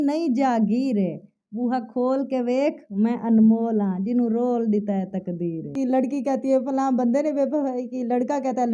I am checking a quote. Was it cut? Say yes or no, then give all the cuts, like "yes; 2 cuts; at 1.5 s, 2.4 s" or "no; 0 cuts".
yes; 1 cut; at 5.7 s